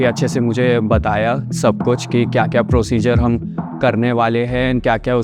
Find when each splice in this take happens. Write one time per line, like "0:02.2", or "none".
none